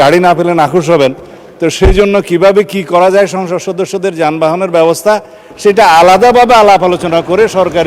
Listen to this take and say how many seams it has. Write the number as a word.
zero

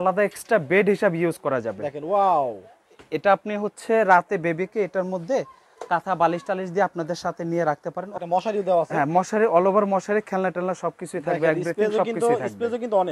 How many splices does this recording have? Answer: one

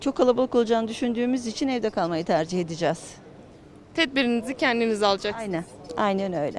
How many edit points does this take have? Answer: zero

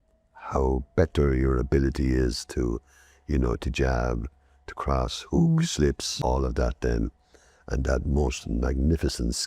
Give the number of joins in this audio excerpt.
one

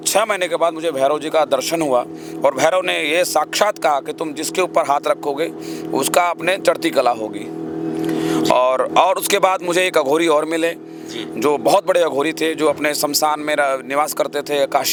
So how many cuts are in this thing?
zero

